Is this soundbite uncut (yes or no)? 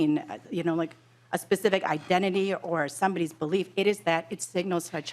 yes